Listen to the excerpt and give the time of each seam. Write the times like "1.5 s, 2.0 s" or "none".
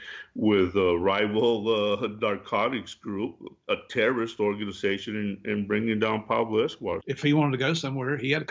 7.0 s